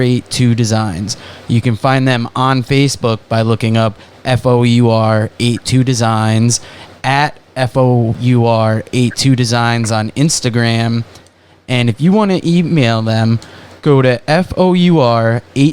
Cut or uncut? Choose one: cut